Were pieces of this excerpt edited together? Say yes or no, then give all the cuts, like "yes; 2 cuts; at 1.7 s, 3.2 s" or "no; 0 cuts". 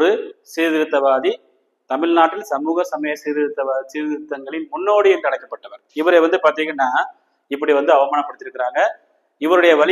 no; 0 cuts